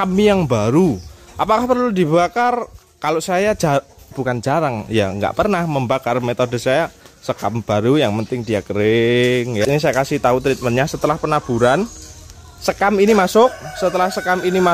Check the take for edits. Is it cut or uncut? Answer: cut